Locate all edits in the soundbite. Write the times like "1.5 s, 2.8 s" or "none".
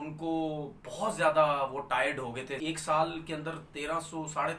2.5 s